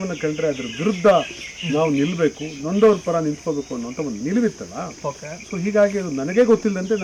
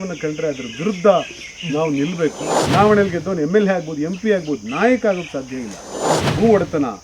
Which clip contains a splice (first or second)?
second